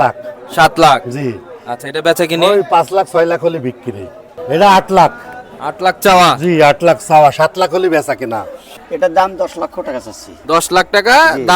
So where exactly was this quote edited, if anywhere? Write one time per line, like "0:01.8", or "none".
0:04.4
0:08.8